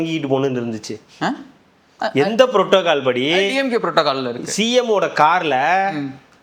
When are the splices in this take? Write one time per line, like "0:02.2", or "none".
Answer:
none